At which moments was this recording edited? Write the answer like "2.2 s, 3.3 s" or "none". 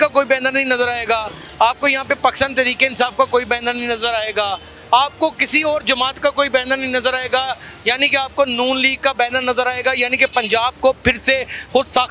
none